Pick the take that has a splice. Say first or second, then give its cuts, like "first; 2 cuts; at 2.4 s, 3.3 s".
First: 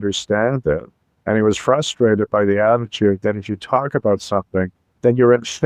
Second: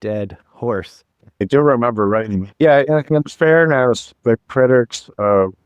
second; 3 cuts; at 1.4 s, 2.5 s, 4.1 s